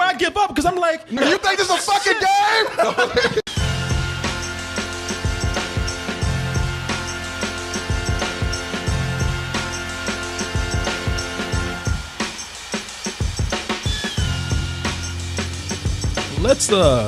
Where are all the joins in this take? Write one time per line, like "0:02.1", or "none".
0:01.0